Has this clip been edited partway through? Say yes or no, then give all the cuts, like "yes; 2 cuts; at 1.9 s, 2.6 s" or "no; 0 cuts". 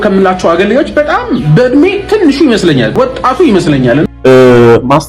yes; 2 cuts; at 2.9 s, 4.1 s